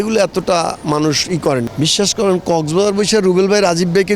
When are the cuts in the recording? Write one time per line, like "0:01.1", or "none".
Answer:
0:01.7